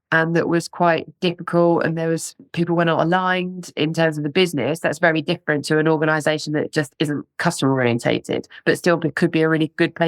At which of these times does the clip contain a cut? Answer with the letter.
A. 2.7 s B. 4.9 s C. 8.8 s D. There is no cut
D